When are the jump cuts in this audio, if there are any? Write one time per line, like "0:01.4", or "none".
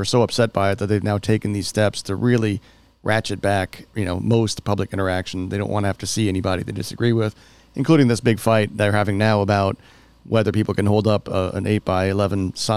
0:03.8